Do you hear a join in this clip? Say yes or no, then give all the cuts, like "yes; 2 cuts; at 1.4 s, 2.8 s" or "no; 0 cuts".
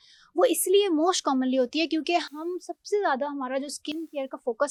no; 0 cuts